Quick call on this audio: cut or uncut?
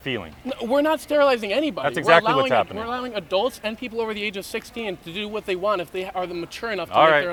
uncut